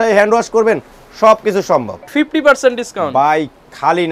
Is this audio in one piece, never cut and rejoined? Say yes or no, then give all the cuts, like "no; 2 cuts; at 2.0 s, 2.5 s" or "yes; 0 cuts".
no; 1 cut; at 2.0 s